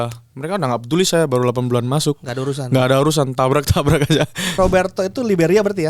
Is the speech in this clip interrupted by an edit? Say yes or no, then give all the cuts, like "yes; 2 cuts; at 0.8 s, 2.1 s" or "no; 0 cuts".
yes; 1 cut; at 4.6 s